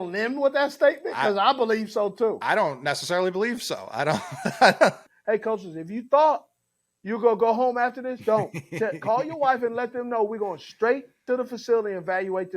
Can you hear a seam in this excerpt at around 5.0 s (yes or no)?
yes